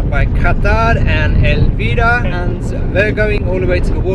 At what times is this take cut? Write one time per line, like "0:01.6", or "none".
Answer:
0:02.3